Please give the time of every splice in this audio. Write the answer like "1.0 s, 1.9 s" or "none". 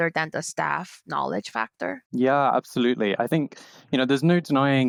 none